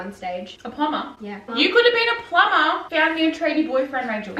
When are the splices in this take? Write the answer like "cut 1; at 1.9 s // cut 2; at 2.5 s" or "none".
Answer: cut 1; at 1.4 s